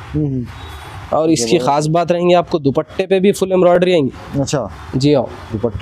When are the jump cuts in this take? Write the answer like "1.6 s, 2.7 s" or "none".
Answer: none